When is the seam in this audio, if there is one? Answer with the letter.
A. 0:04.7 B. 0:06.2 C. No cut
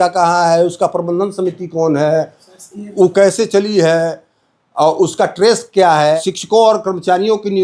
B